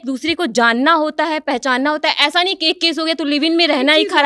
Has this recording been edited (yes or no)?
no